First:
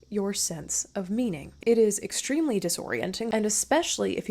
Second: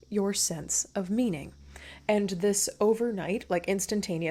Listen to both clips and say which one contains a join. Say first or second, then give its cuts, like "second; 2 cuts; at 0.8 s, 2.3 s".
first; 2 cuts; at 1.5 s, 3.3 s